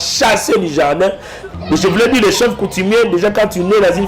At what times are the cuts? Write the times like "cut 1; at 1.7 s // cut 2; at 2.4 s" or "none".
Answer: cut 1; at 1.3 s